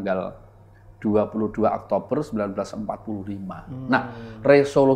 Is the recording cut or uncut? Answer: uncut